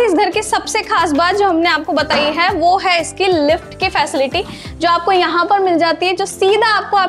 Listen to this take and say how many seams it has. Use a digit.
0